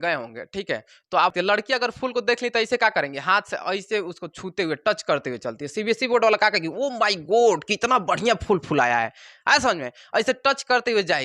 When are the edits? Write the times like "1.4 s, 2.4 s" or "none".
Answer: 1.3 s